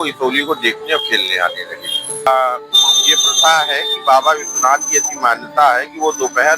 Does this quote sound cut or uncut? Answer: cut